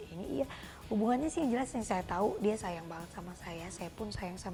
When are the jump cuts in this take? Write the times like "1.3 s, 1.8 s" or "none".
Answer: none